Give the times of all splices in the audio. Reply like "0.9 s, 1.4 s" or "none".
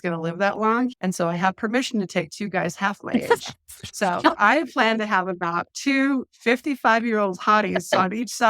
1.0 s